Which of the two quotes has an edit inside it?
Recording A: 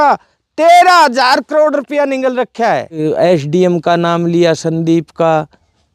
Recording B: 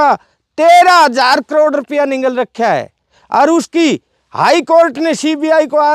A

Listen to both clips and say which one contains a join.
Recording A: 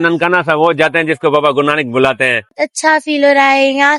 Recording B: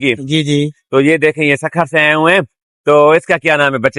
A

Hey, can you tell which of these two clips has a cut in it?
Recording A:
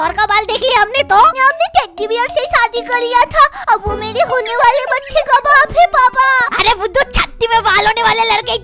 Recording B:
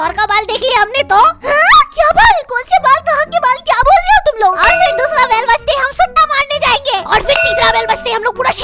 A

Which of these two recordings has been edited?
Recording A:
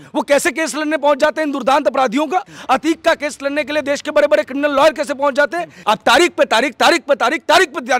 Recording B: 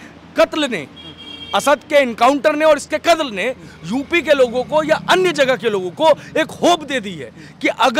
A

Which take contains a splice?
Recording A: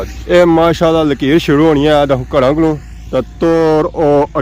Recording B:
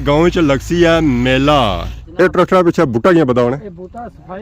B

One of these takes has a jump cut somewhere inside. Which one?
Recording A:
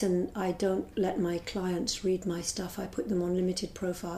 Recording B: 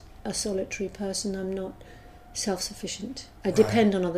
B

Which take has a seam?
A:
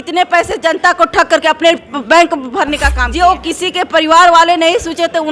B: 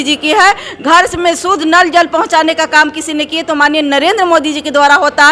A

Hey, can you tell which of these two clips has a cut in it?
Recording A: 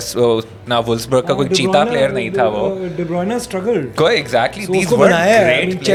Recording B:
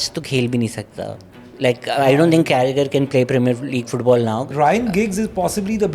B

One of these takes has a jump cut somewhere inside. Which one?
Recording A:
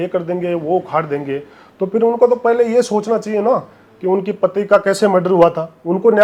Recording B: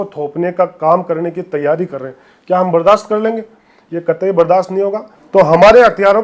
B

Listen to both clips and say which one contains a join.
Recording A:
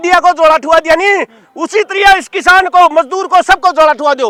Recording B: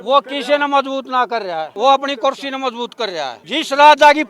B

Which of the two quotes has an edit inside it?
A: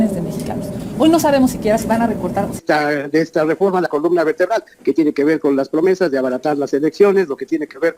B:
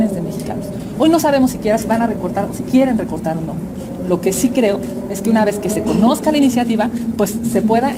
A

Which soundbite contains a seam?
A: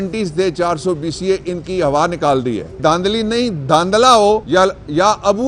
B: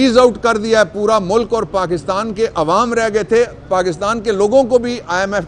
A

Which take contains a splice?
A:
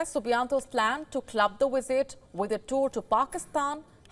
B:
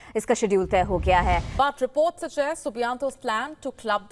B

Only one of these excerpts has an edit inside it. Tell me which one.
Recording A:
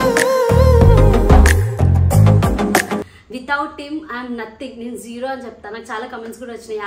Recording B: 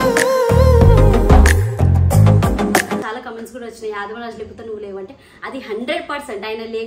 B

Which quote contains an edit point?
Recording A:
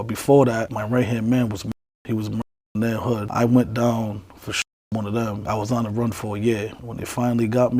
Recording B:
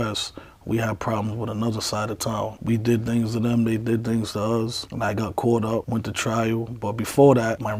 A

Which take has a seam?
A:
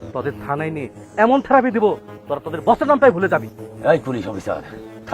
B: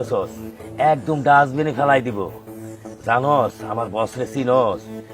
A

